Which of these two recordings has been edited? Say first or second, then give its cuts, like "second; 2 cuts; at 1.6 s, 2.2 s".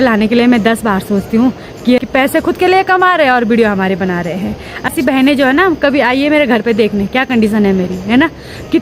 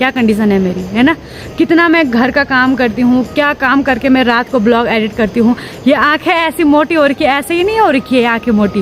first; 2 cuts; at 2.0 s, 4.9 s